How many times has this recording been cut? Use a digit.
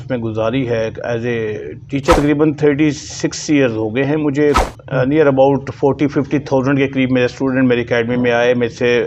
2